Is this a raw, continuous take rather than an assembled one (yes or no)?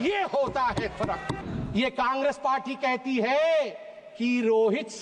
no